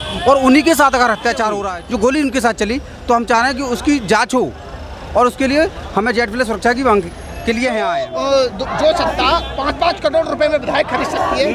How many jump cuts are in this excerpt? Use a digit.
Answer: 2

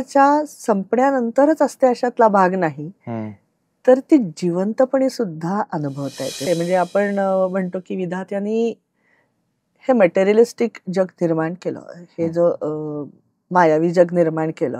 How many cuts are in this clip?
1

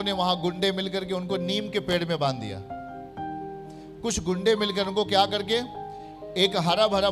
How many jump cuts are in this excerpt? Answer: 2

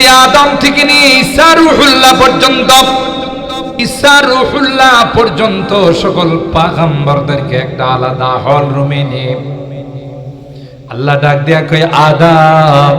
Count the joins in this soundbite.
1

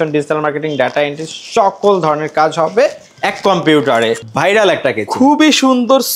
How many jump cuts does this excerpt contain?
1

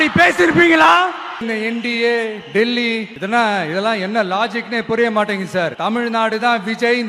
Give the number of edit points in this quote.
3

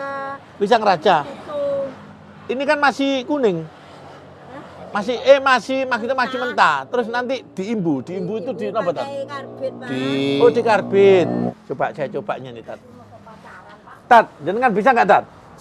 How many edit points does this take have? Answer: 1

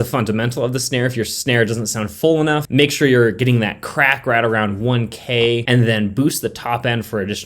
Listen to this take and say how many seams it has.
1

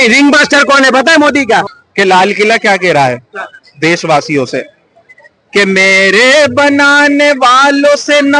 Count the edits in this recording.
1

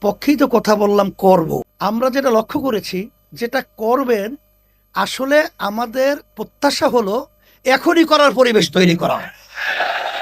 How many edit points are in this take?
1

